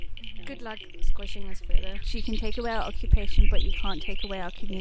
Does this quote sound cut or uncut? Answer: cut